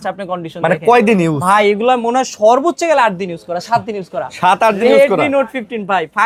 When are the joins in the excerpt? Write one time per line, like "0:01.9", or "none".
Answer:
none